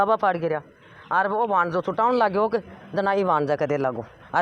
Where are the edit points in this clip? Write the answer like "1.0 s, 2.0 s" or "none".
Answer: none